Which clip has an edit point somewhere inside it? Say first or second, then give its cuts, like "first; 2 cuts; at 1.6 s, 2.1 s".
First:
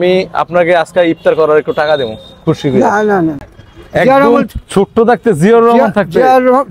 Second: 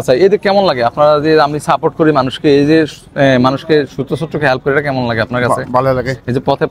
first; 1 cut; at 3.4 s